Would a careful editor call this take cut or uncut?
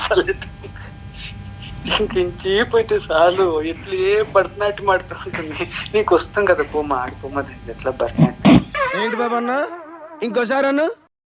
uncut